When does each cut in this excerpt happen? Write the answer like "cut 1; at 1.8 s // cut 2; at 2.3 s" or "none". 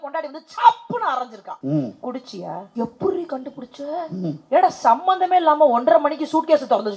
cut 1; at 1.5 s // cut 2; at 2.7 s // cut 3; at 4.4 s